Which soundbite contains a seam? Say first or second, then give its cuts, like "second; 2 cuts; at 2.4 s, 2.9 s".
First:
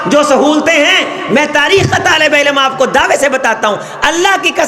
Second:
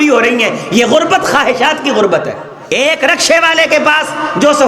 second; 1 cut; at 2.5 s